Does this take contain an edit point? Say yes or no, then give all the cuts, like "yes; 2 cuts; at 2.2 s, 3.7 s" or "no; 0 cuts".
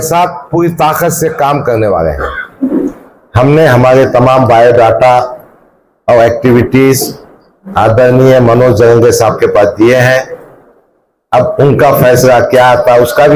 yes; 1 cut; at 2.5 s